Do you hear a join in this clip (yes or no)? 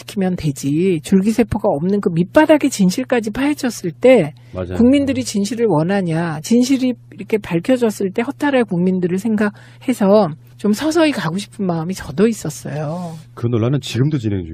yes